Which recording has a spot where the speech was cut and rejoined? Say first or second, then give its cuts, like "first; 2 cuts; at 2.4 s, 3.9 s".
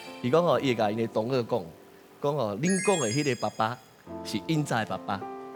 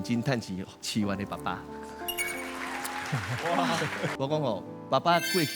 second; 1 cut; at 4.1 s